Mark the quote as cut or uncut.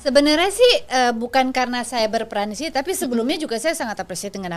uncut